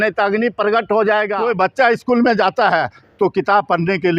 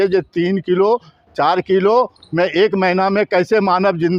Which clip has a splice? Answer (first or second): first